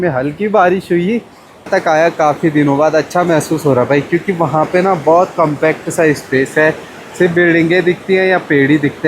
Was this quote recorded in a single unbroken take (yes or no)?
no